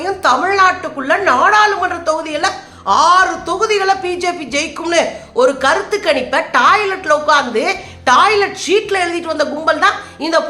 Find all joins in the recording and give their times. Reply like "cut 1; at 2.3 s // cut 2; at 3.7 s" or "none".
none